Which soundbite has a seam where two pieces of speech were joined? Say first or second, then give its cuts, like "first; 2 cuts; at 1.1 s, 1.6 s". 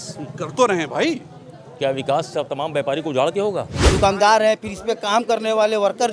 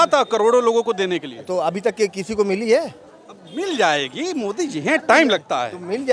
first; 1 cut; at 3.8 s